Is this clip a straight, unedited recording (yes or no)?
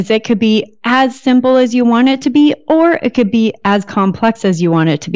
yes